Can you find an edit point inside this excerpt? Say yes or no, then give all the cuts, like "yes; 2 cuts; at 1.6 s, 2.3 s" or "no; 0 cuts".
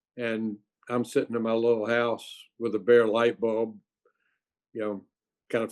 no; 0 cuts